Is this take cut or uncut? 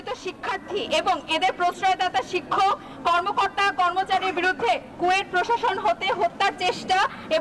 uncut